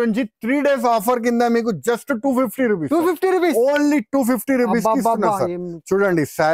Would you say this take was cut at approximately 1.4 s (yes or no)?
no